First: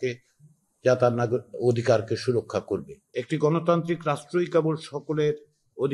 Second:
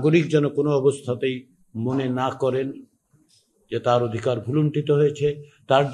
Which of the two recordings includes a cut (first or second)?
first